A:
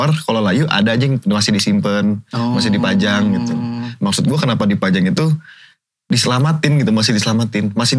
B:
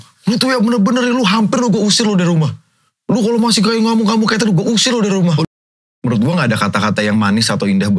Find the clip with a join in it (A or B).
B